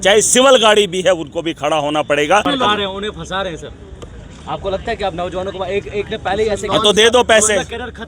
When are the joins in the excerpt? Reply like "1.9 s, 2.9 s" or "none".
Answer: 2.4 s